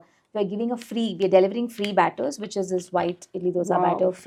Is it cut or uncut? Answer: uncut